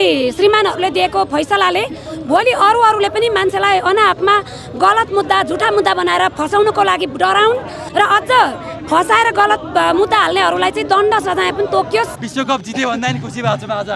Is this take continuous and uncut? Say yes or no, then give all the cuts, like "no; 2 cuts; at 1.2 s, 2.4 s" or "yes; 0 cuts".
no; 2 cuts; at 7.8 s, 12.2 s